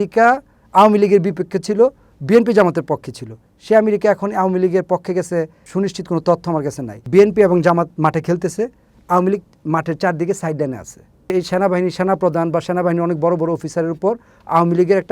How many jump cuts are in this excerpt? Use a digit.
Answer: 3